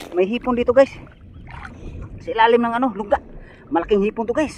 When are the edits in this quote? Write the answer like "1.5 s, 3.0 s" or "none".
none